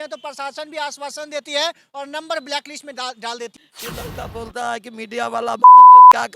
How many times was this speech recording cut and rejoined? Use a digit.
1